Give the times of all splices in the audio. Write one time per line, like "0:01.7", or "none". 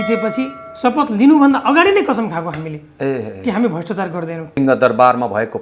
0:04.5